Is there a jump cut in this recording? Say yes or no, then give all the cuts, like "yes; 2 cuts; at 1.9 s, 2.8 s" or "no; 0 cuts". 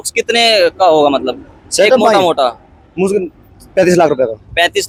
no; 0 cuts